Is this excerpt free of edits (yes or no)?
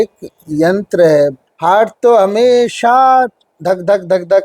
no